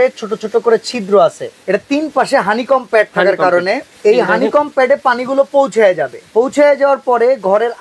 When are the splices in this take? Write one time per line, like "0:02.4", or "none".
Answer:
0:01.5
0:03.9
0:06.1